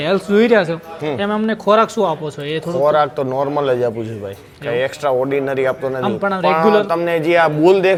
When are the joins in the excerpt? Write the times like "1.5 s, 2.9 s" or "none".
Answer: none